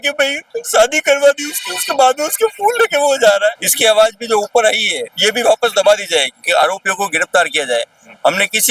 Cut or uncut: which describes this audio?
cut